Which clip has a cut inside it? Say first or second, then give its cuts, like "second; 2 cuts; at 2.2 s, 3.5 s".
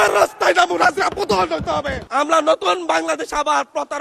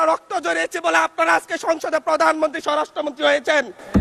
first; 1 cut; at 2.1 s